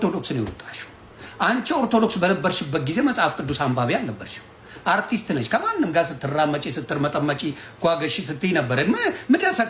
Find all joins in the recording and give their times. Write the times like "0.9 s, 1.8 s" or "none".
none